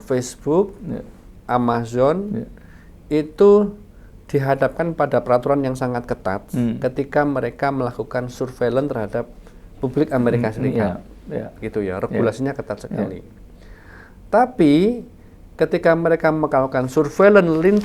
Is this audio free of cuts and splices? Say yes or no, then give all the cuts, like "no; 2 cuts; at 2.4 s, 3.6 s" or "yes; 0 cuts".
yes; 0 cuts